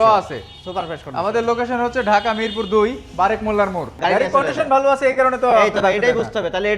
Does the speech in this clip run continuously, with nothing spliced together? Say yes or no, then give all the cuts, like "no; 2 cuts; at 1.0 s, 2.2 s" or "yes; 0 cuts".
no; 1 cut; at 3.9 s